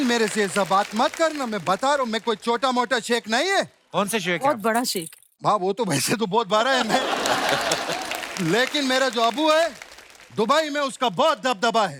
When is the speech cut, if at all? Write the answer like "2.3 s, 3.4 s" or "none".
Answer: none